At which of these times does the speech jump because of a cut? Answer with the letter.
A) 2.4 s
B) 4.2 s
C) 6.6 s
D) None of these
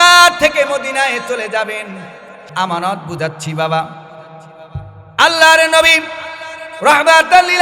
A